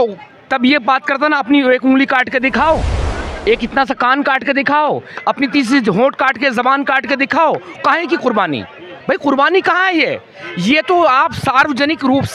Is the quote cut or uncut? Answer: uncut